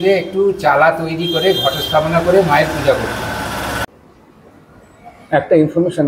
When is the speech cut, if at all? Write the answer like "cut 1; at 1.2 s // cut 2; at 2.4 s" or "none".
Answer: cut 1; at 3.9 s